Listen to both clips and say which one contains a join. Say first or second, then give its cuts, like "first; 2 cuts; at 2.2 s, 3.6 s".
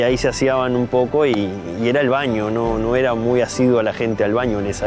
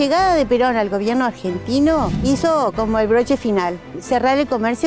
second; 2 cuts; at 2.2 s, 3.9 s